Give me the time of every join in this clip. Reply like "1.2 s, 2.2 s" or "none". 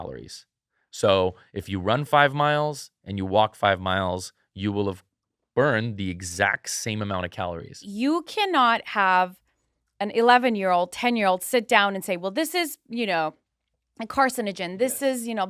7.8 s